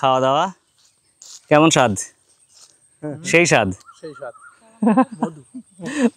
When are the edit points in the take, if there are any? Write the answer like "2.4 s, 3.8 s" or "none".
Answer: none